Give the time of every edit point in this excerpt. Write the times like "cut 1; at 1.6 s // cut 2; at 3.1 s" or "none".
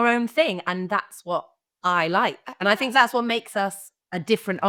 none